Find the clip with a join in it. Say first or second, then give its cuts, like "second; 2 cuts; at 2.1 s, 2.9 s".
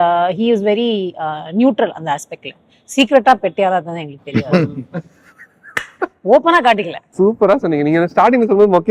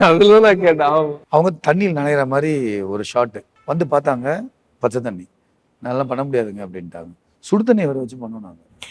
second; 2 cuts; at 1.2 s, 3.5 s